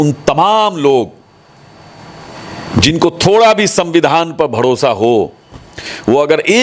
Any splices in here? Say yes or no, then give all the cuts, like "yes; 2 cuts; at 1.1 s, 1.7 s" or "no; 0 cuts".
no; 0 cuts